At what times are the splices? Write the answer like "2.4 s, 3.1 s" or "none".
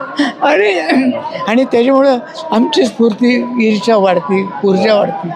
none